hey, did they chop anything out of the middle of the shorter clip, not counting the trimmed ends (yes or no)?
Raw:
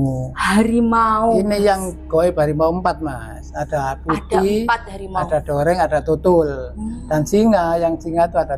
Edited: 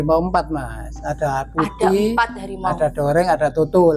no